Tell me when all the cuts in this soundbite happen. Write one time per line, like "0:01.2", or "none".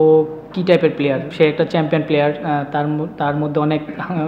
0:01.3